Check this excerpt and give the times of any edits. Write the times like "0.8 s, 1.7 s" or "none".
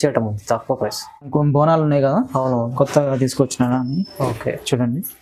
1.3 s